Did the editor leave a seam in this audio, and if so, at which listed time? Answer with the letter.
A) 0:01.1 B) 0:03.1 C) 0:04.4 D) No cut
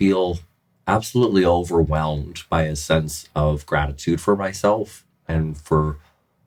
D